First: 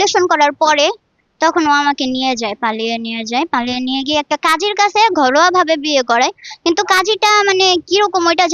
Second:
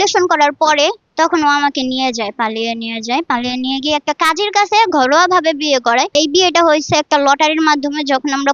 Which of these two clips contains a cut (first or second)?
second